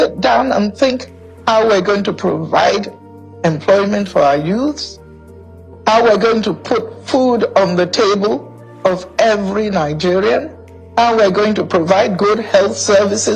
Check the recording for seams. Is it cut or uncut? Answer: uncut